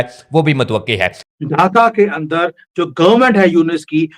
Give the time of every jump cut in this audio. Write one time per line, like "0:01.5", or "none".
0:01.4